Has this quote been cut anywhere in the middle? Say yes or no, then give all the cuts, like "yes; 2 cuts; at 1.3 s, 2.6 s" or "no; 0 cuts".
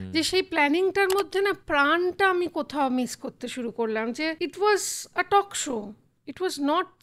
yes; 1 cut; at 4.4 s